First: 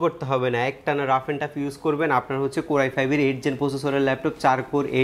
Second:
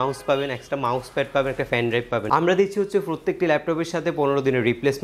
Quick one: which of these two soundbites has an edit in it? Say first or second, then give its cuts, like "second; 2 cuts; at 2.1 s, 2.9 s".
second; 1 cut; at 2.2 s